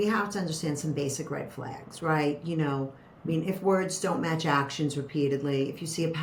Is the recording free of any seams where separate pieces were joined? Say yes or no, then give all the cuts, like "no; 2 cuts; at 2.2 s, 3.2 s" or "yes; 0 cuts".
yes; 0 cuts